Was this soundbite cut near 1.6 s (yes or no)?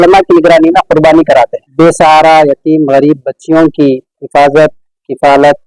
yes